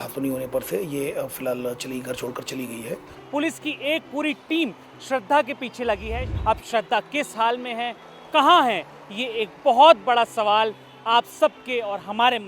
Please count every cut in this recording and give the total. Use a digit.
2